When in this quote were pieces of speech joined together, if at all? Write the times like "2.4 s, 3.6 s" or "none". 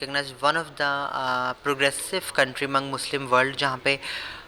none